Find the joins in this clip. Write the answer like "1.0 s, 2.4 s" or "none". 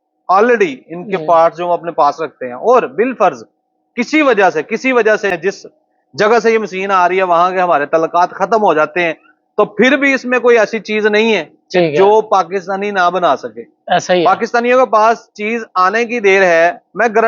5.4 s